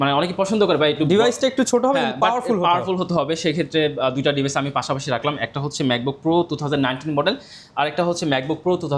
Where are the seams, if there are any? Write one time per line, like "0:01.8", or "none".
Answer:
none

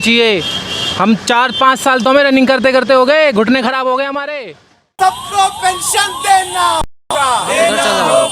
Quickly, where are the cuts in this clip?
0:04.9

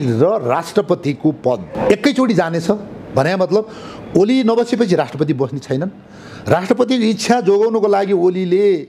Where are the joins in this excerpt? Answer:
0:01.7

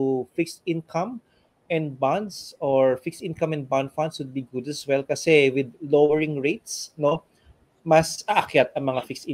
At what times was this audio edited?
none

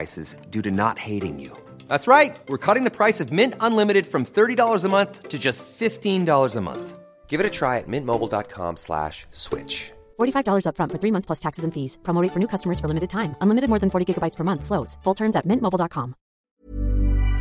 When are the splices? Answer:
0:16.4

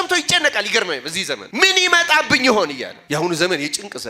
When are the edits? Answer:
0:01.5
0:02.9

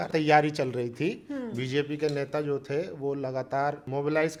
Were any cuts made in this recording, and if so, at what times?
none

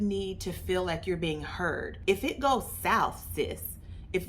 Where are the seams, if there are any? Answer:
0:01.9

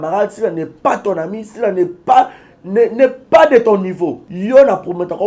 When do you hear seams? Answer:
0:04.3

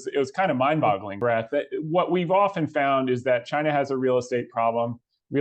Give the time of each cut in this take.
0:01.2

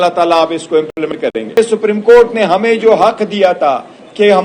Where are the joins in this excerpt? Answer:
0:01.6

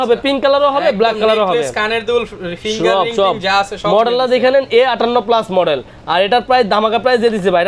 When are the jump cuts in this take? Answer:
none

